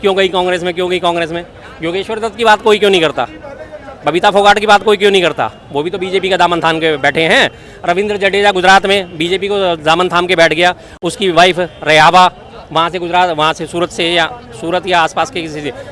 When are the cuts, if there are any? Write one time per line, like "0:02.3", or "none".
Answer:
none